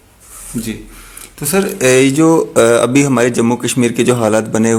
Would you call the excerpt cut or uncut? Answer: uncut